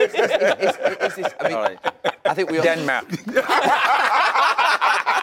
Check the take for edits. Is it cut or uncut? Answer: cut